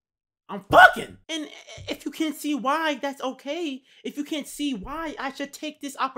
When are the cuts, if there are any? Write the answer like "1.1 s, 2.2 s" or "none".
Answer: 1.2 s